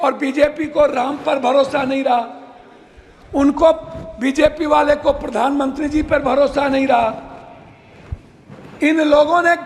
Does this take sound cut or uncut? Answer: uncut